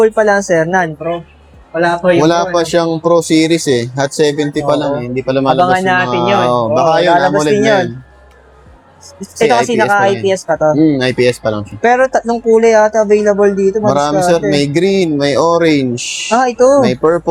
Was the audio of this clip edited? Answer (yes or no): no